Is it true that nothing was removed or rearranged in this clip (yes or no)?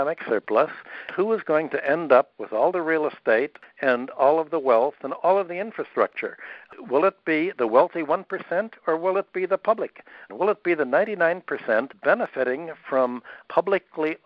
no